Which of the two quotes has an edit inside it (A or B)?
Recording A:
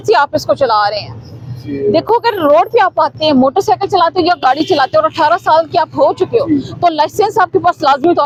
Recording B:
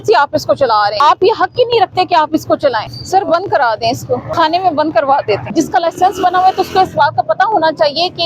B